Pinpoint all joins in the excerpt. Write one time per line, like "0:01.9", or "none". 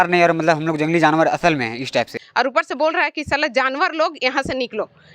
0:02.2